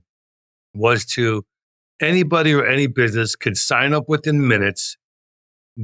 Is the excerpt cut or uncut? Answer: uncut